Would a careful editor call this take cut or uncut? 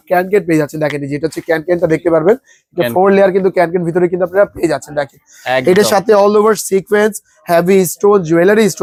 uncut